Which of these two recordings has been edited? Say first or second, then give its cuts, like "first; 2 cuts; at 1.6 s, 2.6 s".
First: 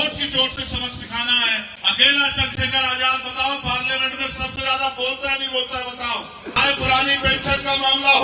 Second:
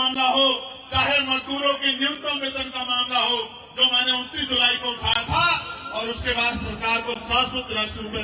first; 2 cuts; at 1.7 s, 6.5 s